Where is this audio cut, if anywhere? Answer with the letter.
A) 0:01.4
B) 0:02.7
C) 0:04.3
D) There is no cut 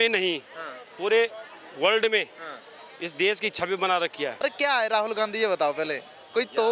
C